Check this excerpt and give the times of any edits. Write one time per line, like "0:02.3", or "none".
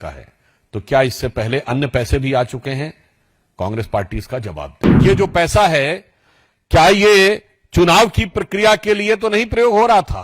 0:04.8